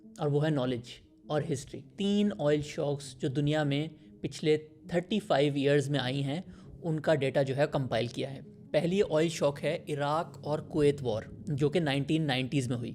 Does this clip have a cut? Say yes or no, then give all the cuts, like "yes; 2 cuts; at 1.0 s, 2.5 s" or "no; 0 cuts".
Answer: yes; 1 cut; at 1.9 s